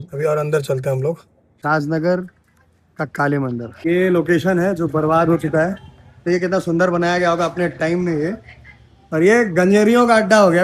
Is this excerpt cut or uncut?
cut